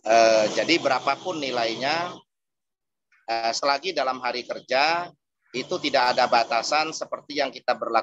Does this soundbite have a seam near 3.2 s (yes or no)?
no